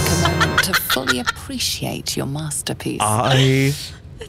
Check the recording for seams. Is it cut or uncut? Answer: uncut